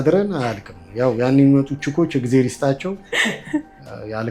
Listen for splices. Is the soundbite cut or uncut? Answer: uncut